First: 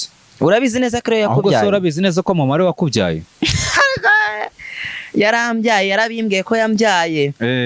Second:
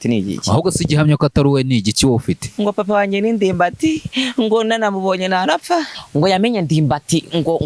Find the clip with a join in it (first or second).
second